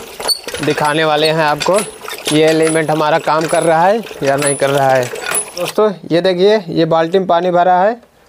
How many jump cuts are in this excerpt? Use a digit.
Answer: 1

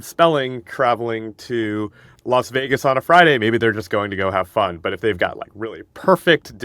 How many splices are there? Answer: 1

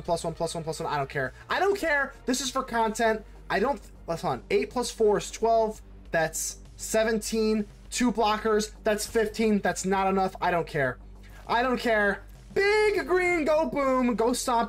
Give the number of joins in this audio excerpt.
0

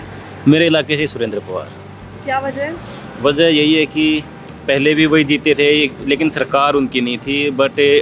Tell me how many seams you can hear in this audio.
0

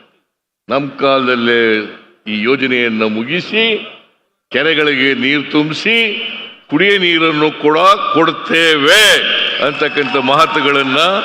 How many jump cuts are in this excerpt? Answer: 0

